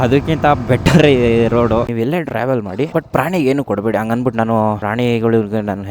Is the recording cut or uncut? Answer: cut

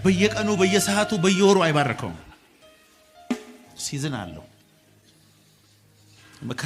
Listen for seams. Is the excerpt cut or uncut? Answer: uncut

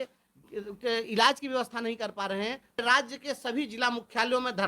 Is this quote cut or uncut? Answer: cut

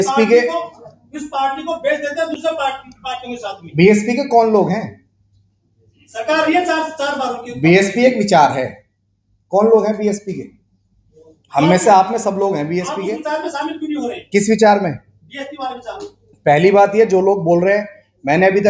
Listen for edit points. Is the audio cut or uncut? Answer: uncut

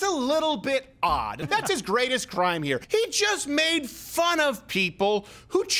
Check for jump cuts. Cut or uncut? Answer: cut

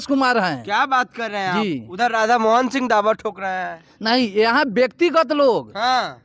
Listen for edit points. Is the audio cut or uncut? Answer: uncut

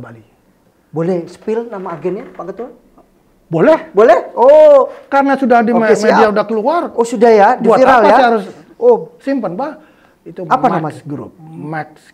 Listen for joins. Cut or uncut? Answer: uncut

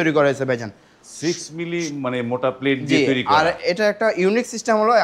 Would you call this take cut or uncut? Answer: uncut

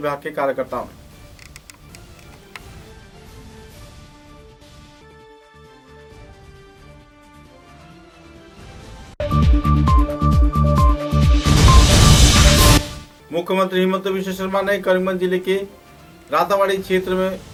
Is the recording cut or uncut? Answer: uncut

